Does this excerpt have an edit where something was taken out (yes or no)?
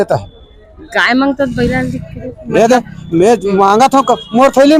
no